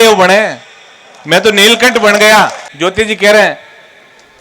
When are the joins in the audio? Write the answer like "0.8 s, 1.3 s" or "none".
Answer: 2.6 s